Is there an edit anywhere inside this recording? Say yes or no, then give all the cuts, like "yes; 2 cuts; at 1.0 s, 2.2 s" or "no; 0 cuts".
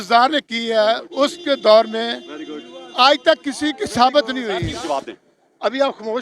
yes; 1 cut; at 4.8 s